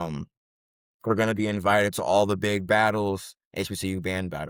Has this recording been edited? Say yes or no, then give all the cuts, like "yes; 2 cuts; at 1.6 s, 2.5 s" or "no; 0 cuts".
no; 0 cuts